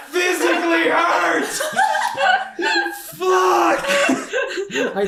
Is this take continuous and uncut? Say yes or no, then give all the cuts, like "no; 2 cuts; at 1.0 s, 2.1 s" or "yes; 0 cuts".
yes; 0 cuts